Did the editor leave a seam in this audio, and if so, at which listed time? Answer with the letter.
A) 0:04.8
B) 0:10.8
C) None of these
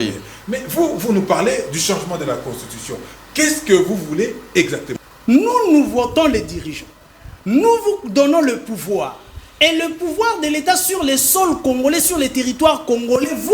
A